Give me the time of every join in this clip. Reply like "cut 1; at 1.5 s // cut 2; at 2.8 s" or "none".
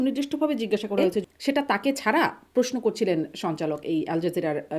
cut 1; at 1.2 s